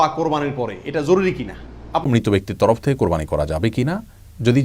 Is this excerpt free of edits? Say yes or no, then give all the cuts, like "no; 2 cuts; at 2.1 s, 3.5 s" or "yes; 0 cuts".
no; 1 cut; at 2.0 s